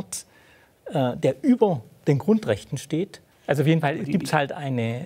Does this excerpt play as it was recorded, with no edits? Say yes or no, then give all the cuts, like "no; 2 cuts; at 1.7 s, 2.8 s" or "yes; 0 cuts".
no; 1 cut; at 3.2 s